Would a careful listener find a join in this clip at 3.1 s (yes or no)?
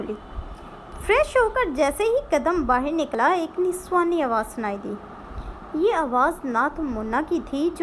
yes